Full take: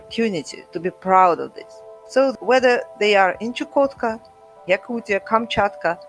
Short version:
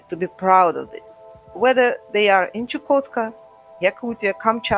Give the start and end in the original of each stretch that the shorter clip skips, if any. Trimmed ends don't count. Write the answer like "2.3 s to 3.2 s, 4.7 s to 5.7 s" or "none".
2.1 s to 2.3 s